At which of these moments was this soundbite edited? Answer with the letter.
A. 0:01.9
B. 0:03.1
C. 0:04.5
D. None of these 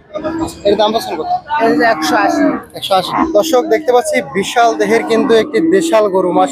B